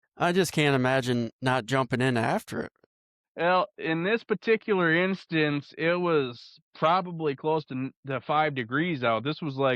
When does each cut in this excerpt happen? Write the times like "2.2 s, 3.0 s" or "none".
3.1 s